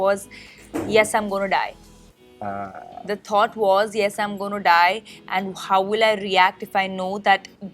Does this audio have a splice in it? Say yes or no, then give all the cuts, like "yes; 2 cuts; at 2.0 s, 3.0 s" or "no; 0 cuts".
no; 0 cuts